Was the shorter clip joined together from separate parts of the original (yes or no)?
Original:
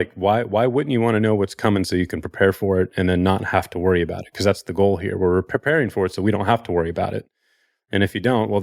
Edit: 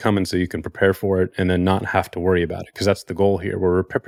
no